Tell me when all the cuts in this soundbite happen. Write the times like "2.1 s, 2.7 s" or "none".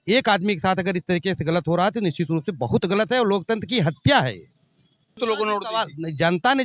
5.0 s